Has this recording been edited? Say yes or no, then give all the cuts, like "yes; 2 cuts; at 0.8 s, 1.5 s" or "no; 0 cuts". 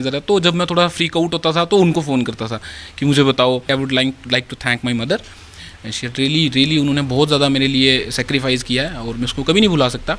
yes; 1 cut; at 3.7 s